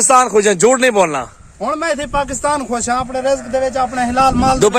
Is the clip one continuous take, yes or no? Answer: yes